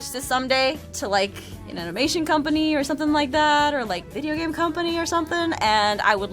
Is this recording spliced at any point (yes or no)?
yes